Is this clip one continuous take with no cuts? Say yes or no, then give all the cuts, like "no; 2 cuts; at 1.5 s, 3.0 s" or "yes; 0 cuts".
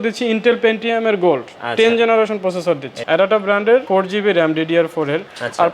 no; 2 cuts; at 2.9 s, 3.9 s